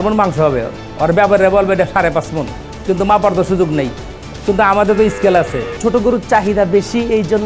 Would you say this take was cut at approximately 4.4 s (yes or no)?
no